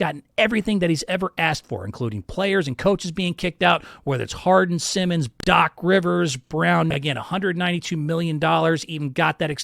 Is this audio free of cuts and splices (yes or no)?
no